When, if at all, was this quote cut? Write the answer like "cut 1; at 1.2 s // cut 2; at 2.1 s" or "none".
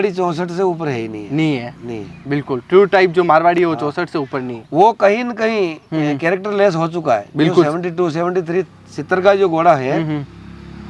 none